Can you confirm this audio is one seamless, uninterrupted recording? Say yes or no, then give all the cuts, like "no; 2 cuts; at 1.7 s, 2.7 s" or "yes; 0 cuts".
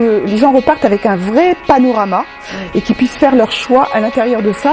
yes; 0 cuts